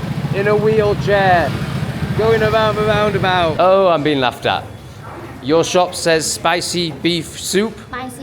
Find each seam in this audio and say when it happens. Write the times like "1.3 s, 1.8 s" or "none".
3.5 s